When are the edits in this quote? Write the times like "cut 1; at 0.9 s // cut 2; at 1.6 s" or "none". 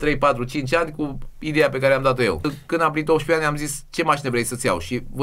cut 1; at 2.6 s

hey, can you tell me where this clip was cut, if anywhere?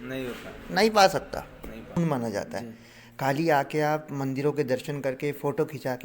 cut 1; at 2.0 s

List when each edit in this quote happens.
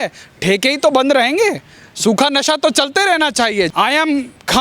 cut 1; at 3.7 s

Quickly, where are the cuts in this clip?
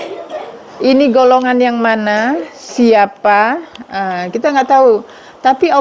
none

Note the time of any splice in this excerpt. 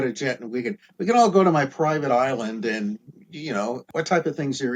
cut 1; at 3.8 s

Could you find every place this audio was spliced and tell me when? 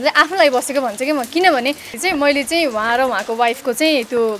cut 1; at 1.9 s

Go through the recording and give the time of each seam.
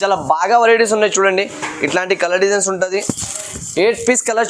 none

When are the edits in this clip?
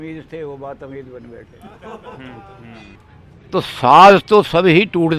cut 1; at 3.0 s

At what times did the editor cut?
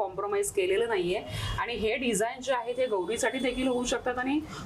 none

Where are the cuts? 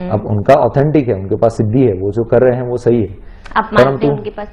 none

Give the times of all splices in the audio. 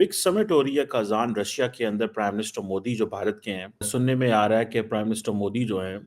cut 1; at 3.9 s

